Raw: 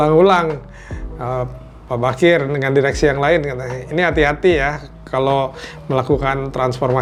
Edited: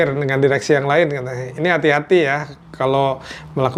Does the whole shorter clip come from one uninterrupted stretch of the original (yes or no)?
yes